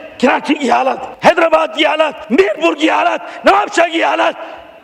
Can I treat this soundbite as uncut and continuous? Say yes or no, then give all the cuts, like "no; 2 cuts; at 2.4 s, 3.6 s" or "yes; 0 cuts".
yes; 0 cuts